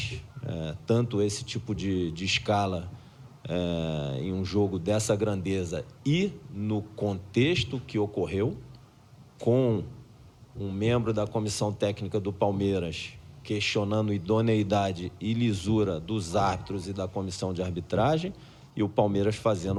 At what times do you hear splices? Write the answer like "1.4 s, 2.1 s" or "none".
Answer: none